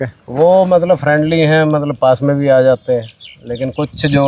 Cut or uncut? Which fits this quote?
uncut